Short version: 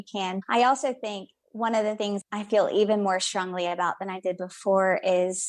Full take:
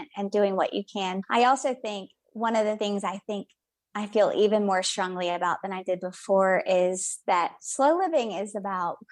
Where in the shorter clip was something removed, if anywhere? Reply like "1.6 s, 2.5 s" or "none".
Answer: 2.2 s